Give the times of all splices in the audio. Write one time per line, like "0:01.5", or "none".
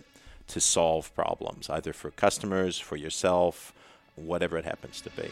0:04.1